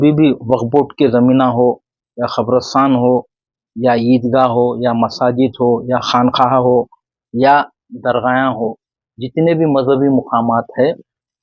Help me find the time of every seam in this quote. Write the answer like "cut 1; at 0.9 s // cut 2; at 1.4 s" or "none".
none